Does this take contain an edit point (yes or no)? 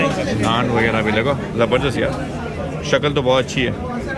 no